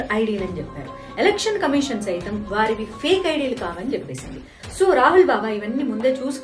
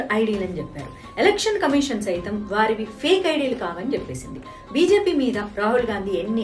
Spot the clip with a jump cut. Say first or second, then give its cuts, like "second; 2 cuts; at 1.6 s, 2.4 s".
first; 1 cut; at 4.6 s